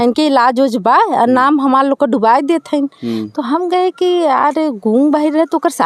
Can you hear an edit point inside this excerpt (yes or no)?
no